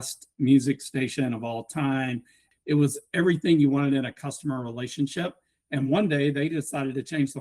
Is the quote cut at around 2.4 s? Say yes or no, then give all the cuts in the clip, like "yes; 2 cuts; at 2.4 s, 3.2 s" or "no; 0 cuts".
yes; 1 cut; at 2.4 s